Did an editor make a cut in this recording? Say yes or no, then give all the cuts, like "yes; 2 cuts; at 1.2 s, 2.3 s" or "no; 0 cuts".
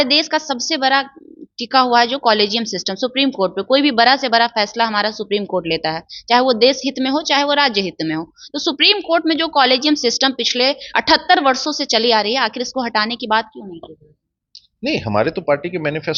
no; 0 cuts